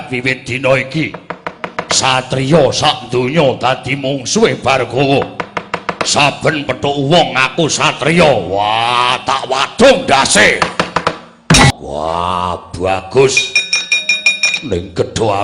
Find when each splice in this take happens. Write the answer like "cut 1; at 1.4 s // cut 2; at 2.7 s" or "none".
cut 1; at 11.7 s